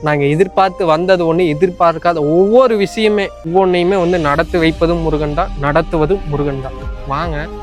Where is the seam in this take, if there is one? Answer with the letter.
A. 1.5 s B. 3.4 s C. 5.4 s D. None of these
B